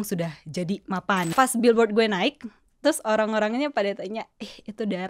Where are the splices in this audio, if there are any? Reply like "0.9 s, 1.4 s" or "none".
1.3 s

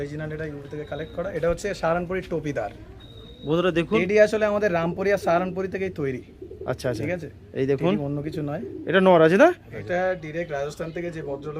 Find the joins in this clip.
4.0 s, 9.7 s

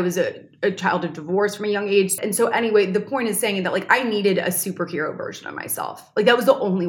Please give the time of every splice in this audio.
2.2 s

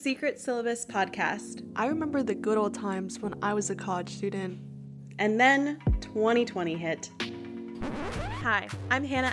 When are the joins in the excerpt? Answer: 1.6 s, 8.2 s

